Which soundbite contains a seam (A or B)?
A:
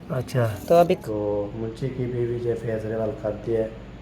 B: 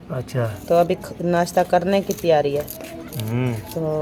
A